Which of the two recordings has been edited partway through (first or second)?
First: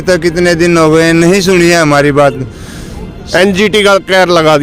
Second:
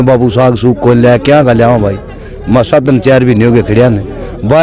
first